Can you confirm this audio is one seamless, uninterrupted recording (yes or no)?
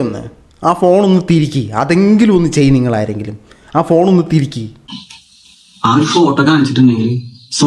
no